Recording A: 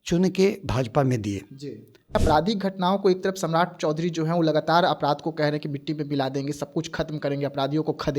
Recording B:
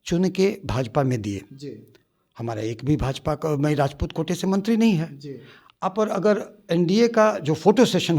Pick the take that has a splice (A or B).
A